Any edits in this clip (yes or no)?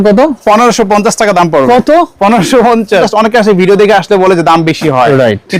yes